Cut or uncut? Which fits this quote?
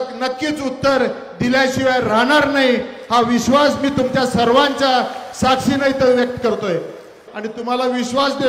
cut